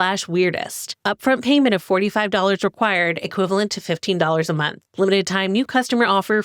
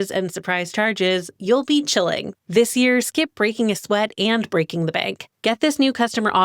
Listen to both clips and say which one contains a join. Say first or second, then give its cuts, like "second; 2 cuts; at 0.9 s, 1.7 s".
second; 1 cut; at 2.3 s